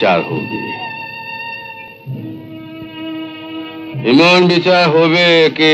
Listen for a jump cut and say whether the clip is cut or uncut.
uncut